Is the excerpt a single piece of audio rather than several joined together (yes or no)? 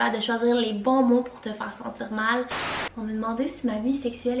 no